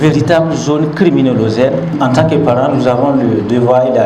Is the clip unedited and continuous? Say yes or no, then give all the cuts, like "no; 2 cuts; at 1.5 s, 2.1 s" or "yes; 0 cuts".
no; 1 cut; at 1.9 s